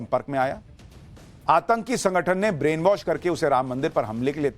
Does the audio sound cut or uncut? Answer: cut